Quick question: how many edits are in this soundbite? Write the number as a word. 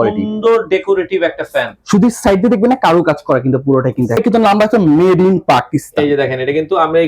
one